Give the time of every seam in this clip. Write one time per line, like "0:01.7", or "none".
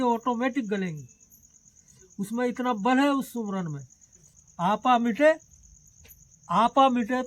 0:04.4